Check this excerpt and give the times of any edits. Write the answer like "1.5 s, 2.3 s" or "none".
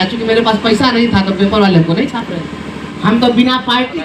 2.9 s